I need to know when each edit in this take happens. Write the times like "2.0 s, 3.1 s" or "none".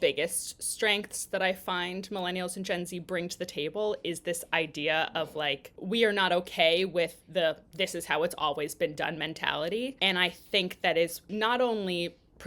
5.7 s, 10.0 s, 11.2 s